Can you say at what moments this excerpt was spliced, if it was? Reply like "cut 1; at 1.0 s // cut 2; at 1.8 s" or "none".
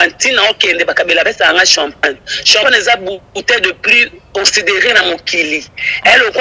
none